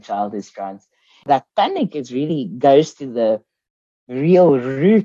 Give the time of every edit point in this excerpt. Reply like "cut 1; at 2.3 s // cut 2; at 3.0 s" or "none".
cut 1; at 1.2 s